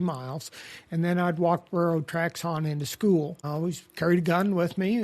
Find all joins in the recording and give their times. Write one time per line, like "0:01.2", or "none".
0:03.5